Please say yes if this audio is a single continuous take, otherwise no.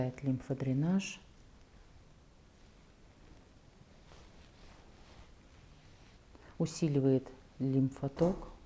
yes